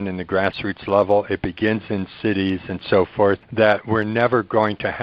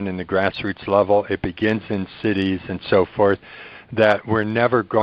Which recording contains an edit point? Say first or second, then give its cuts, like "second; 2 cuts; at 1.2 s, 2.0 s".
first; 1 cut; at 3.5 s